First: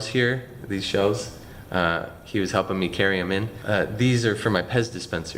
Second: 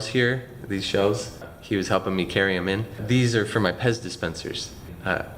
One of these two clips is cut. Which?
second; 2 cuts; at 1.5 s, 3.0 s

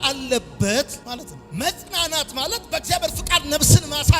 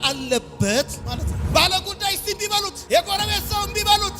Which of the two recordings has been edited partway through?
second; 1 cut; at 1.4 s

